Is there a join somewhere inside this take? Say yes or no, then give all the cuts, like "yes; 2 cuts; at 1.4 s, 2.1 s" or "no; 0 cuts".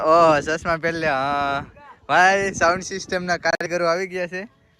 no; 0 cuts